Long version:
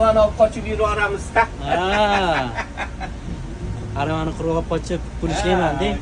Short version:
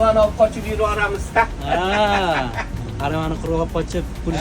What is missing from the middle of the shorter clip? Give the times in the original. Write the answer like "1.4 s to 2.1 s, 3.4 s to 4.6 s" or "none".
2.7 s to 3.7 s